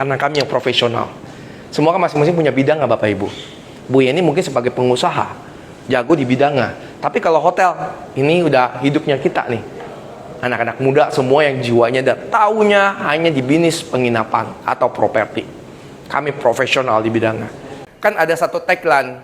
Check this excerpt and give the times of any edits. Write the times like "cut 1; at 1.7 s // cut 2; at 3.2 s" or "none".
cut 1; at 17.8 s